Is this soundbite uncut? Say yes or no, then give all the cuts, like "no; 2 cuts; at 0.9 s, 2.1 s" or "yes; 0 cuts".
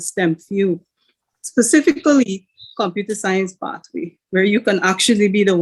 yes; 0 cuts